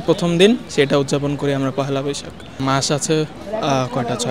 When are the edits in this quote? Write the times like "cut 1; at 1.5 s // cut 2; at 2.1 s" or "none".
cut 1; at 2.6 s